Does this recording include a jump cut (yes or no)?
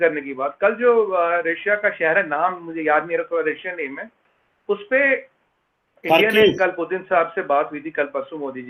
no